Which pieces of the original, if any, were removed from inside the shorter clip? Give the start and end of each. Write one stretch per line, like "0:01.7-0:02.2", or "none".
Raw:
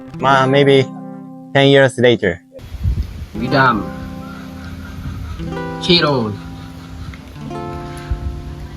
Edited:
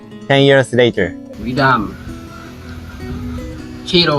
0:02.5-0:03.2